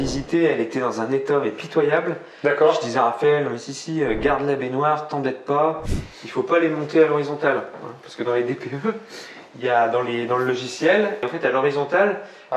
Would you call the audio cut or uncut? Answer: cut